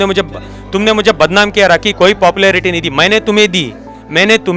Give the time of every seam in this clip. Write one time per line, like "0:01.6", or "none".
none

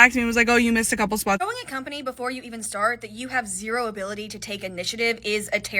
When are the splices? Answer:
0:01.4

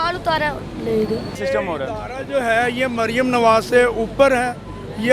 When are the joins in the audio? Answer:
0:01.4

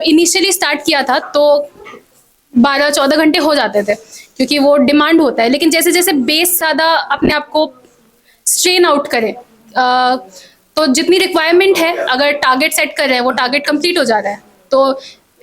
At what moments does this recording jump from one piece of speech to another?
0:06.6

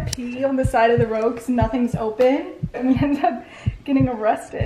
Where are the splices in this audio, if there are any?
0:02.8

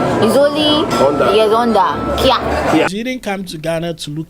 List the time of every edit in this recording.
0:02.9

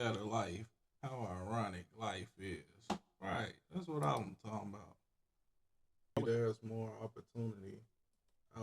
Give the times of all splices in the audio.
0:06.2

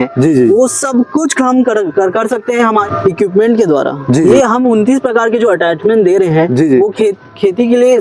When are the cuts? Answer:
none

